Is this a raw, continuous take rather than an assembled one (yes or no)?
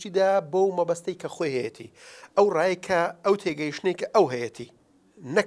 yes